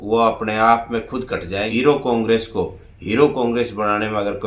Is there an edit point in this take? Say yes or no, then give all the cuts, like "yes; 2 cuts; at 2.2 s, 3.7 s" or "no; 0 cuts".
yes; 1 cut; at 1.5 s